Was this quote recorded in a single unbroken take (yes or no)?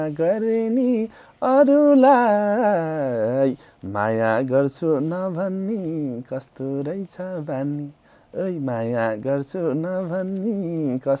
yes